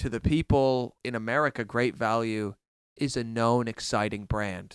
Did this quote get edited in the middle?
yes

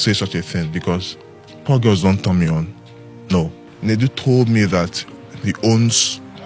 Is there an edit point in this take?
yes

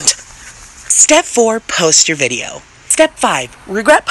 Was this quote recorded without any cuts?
yes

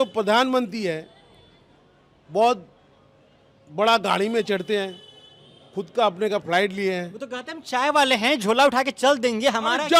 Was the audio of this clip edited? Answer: no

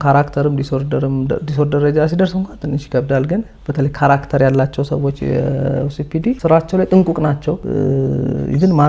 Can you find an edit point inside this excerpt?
yes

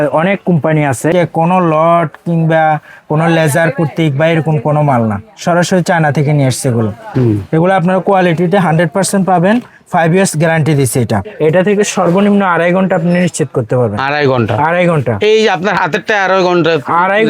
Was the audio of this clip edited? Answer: yes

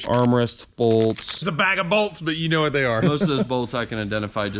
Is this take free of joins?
no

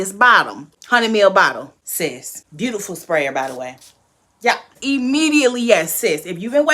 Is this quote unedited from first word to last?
yes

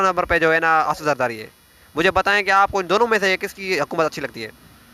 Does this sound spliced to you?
no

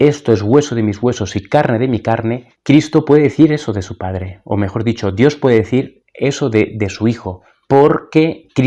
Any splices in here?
yes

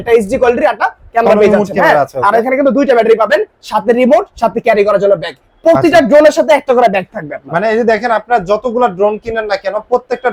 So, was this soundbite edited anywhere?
no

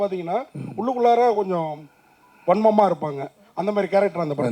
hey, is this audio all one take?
yes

